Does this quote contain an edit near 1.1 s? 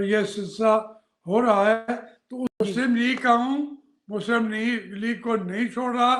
no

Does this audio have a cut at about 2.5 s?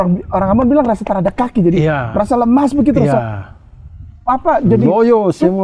no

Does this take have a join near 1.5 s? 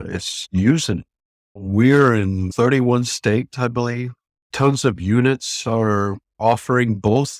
yes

